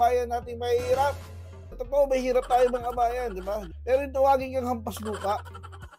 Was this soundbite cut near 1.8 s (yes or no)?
yes